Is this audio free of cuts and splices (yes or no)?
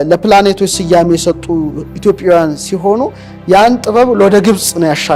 yes